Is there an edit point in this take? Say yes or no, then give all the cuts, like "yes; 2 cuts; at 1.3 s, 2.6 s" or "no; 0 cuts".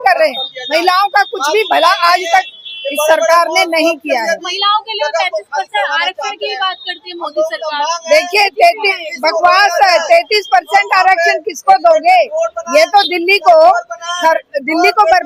no; 0 cuts